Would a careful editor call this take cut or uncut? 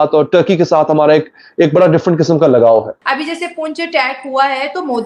cut